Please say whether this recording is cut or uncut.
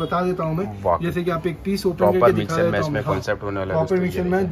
uncut